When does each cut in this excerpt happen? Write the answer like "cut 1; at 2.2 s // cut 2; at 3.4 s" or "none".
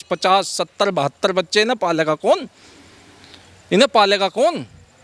none